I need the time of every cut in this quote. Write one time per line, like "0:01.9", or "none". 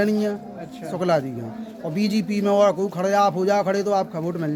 none